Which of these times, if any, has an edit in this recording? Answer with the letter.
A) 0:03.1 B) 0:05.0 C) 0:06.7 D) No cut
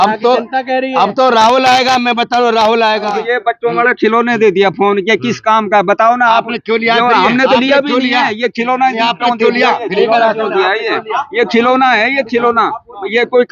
A